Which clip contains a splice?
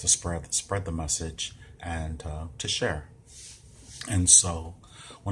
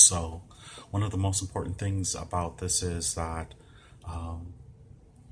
first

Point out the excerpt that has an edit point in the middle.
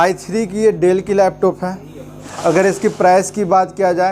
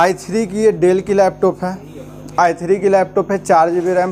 first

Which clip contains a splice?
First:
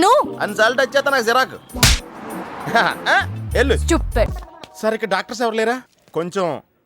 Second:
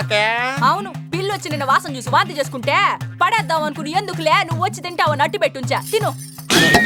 first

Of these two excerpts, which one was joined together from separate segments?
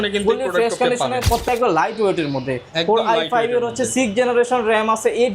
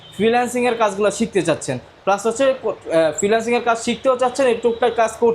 first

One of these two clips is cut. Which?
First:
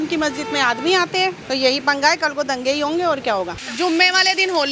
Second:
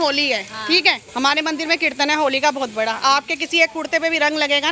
first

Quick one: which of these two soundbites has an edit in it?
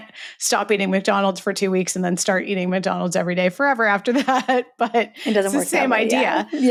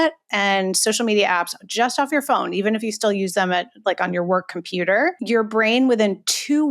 second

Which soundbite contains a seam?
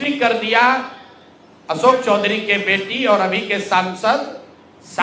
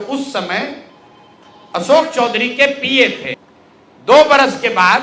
second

